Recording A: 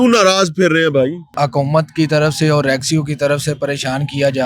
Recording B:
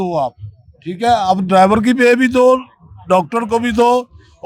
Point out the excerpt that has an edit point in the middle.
A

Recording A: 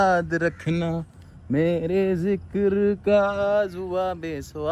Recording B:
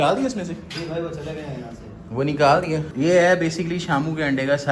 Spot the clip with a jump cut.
B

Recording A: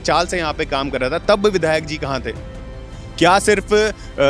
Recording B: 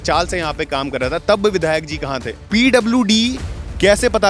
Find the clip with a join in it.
B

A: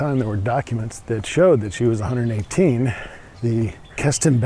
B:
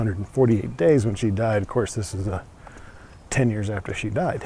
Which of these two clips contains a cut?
A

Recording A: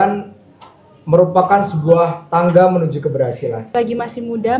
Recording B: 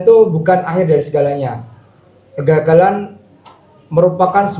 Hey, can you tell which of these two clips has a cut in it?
A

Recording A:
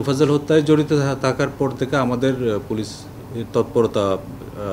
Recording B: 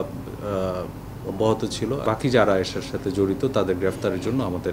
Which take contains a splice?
B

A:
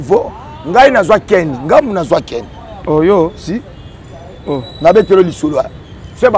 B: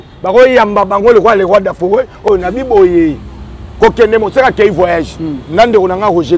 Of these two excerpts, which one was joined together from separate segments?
B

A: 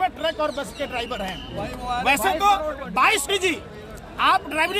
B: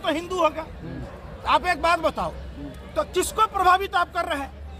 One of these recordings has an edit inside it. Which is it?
A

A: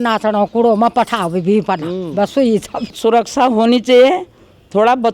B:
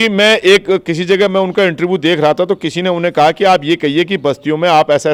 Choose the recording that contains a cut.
A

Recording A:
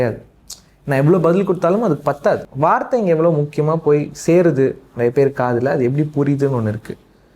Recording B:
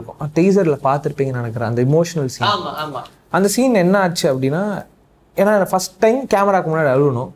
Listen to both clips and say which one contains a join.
A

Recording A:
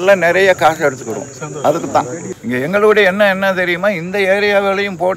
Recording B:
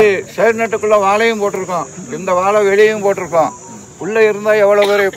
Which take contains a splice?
A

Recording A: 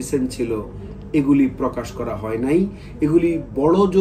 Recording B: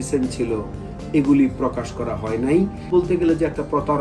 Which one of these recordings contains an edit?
B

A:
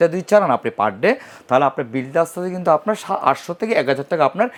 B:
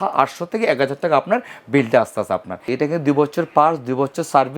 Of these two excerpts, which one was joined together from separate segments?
B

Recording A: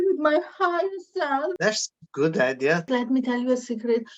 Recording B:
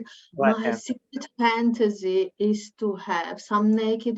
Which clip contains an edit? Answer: A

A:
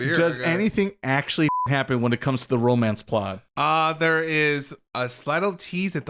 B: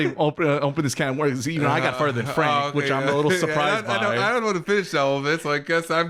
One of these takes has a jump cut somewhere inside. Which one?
A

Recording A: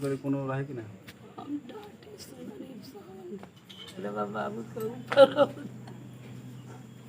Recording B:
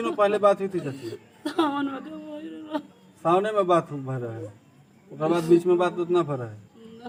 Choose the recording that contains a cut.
A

